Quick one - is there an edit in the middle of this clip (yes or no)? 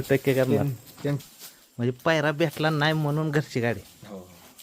yes